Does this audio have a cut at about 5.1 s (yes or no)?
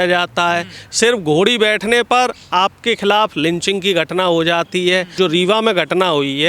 yes